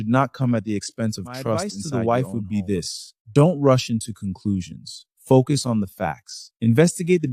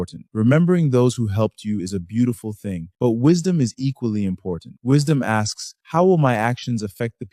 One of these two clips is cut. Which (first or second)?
first